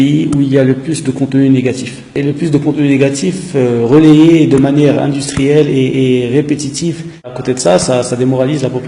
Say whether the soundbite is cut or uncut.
cut